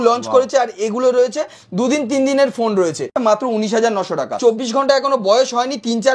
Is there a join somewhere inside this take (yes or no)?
yes